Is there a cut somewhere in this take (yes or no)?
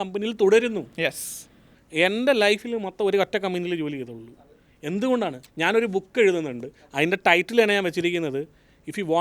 yes